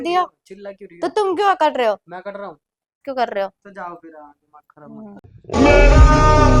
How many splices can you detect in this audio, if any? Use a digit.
2